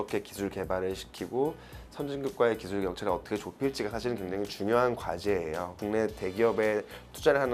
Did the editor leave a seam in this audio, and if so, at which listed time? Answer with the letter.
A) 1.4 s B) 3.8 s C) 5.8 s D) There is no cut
C